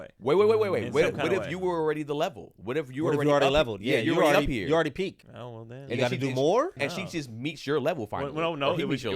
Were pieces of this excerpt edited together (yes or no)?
yes